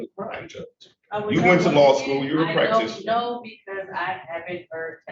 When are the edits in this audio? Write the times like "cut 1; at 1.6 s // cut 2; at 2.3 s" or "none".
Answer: none